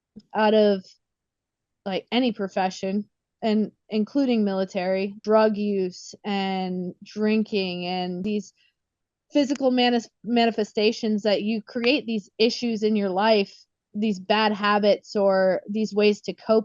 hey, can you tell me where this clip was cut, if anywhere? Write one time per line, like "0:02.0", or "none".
0:05.2
0:08.2

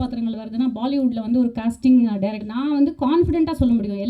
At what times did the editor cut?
0:02.5

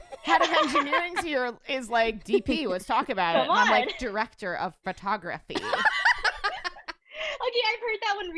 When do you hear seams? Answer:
none

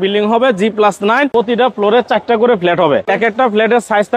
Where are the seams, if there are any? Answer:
0:01.3
0:03.1

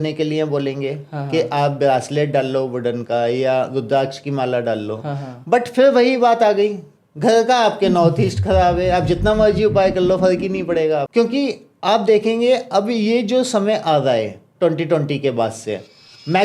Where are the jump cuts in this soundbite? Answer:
0:11.1

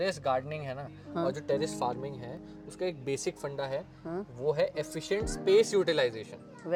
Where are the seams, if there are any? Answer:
none

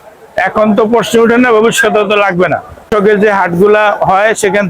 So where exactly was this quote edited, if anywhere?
0:02.9

